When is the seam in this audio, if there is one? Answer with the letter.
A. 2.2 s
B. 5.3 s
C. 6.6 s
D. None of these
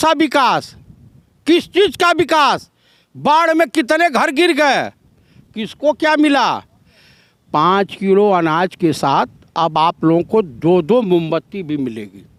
D